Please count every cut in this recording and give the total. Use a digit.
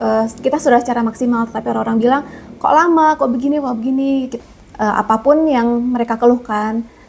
1